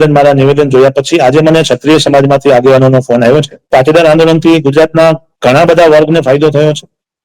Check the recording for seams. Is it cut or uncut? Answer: cut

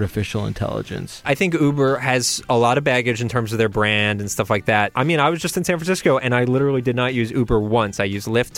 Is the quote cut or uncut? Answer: cut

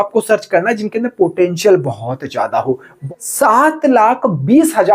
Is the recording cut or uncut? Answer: cut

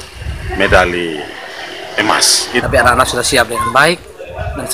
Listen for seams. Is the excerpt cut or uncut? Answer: cut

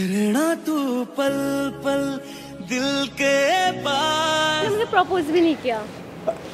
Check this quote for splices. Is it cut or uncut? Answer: cut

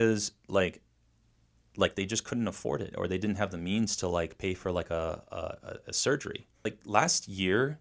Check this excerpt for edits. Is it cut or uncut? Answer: cut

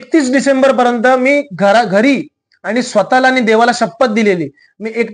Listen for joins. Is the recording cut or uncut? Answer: uncut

